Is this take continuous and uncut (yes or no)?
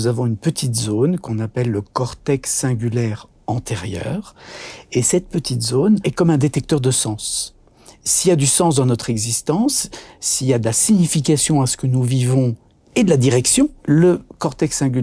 no